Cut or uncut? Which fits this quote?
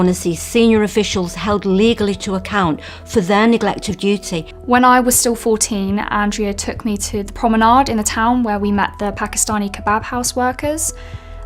cut